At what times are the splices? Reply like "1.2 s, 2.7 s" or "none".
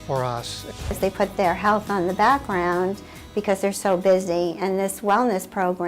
1.0 s